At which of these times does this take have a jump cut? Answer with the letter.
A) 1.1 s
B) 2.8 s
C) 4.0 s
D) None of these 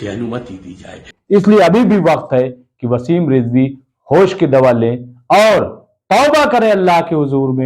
A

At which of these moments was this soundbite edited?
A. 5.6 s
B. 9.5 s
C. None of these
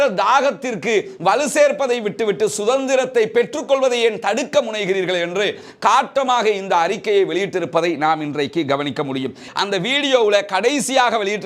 B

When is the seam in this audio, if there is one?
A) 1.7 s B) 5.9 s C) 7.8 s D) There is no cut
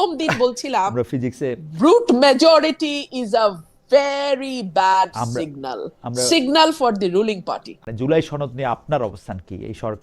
C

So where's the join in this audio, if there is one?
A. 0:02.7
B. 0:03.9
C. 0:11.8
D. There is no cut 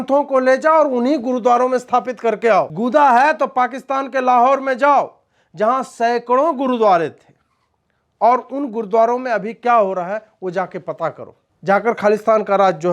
A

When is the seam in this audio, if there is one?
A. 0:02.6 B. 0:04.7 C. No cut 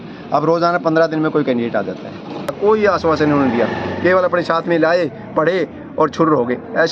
A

